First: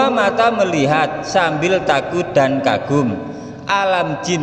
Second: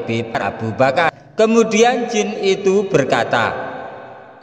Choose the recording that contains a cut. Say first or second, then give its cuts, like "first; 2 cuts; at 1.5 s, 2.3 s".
second; 1 cut; at 1.1 s